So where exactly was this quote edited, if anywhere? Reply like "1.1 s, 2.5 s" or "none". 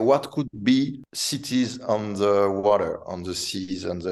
none

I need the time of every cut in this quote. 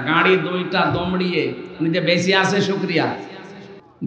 none

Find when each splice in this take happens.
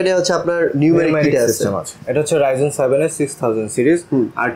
1.9 s

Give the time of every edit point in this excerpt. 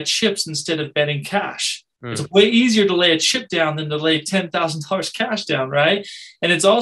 none

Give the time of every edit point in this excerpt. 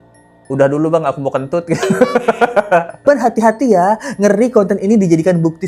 3.0 s

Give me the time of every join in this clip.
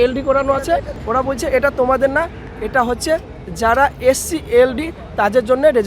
0.9 s

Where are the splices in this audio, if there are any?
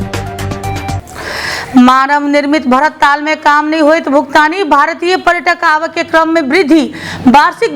1.0 s

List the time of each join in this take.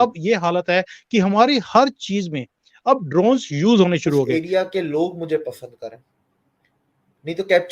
4.4 s

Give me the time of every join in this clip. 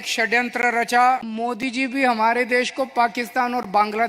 1.3 s

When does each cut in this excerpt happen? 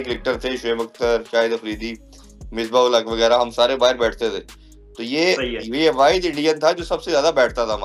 none

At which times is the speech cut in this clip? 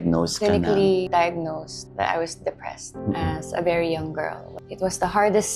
2.9 s, 4.6 s

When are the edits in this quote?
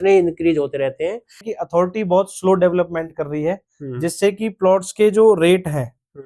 1.5 s

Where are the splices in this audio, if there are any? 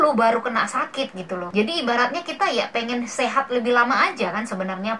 1.5 s

